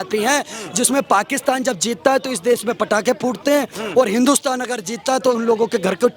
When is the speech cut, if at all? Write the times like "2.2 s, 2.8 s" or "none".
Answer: none